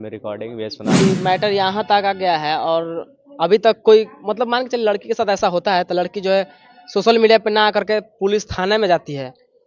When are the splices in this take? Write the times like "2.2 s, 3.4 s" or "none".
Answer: 1.0 s